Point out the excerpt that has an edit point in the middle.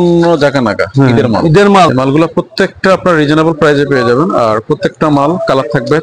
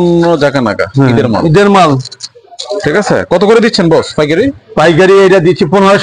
first; 1 cut; at 1.9 s

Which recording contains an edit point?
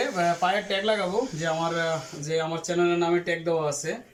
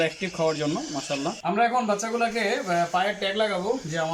second; 1 cut; at 1.4 s

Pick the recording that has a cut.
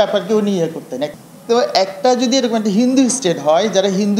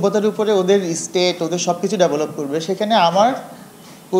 first; 1 cut; at 1.1 s

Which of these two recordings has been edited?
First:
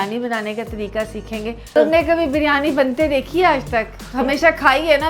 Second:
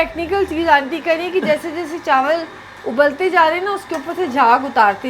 first; 1 cut; at 1.7 s

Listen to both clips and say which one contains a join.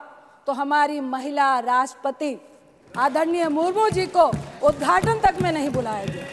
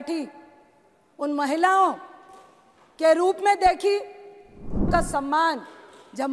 second; 1 cut; at 4.9 s

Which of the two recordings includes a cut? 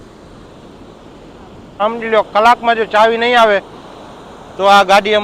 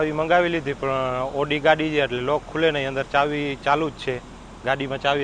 first; 1 cut; at 1.8 s

